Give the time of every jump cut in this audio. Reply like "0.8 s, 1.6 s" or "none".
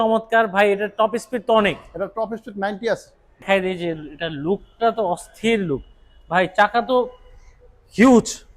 3.4 s